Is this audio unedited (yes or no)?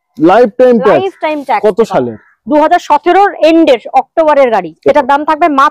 no